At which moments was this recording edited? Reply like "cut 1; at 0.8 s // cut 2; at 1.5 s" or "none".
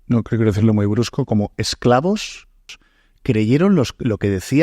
cut 1; at 2.8 s